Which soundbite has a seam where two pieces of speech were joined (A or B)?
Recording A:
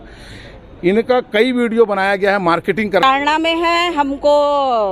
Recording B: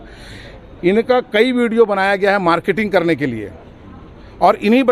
A